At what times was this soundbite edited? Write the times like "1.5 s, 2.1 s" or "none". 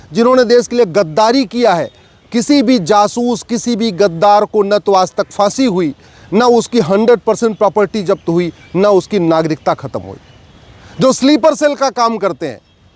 none